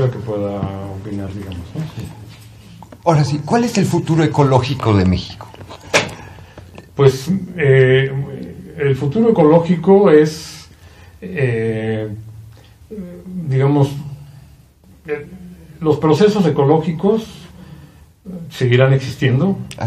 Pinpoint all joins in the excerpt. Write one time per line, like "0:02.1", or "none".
none

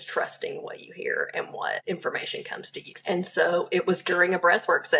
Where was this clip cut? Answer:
0:01.8
0:02.9

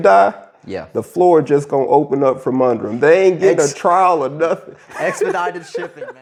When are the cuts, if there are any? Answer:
none

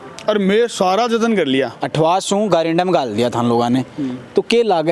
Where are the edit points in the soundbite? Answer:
0:01.8

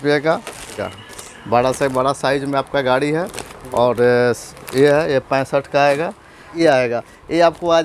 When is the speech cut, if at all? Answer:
0:00.8
0:06.5

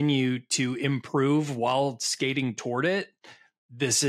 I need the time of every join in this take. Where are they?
none

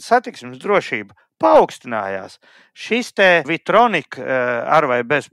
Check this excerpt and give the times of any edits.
0:03.6

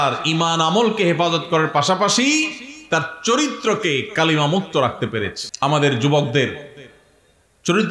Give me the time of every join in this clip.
0:05.4

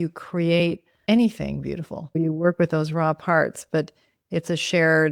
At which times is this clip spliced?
0:00.9
0:02.2

